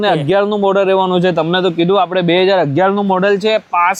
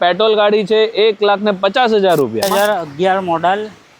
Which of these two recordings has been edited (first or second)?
second